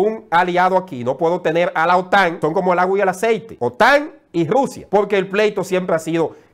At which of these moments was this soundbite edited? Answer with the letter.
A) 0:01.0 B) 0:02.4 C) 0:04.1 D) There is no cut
B